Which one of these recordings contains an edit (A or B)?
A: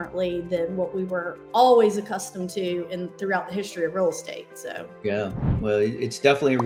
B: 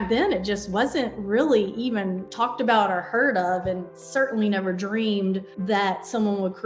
B